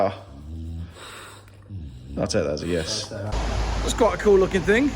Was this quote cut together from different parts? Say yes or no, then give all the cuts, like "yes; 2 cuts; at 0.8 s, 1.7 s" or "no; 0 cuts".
yes; 1 cut; at 3.3 s